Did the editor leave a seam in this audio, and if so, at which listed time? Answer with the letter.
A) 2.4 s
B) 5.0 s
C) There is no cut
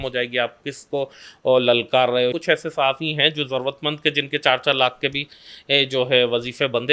A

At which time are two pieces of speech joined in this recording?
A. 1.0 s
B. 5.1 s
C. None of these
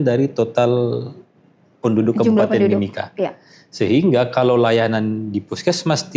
C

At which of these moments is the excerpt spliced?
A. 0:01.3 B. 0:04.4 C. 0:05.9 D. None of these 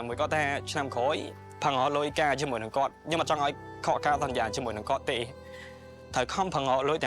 A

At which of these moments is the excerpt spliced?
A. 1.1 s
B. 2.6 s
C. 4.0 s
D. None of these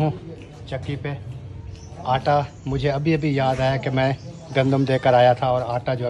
D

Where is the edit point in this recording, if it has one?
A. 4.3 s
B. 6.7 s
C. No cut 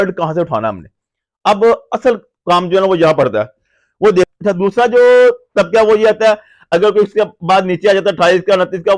A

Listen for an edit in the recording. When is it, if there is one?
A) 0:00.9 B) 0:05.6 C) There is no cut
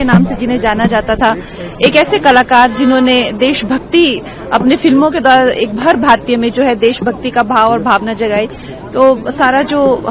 C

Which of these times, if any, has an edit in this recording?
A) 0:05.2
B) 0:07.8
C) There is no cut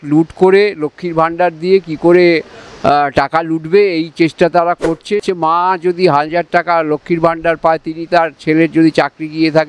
A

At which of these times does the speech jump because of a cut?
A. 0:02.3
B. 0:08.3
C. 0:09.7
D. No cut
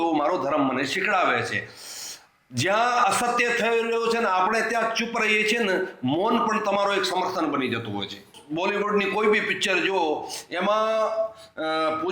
B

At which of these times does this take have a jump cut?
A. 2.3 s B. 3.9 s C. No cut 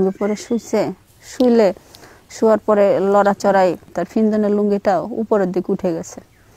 B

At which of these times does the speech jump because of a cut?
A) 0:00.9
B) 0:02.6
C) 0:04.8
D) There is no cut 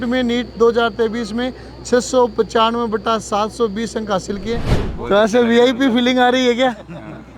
C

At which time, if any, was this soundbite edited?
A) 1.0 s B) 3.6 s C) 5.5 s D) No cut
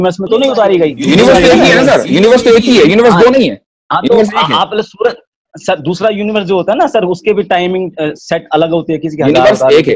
A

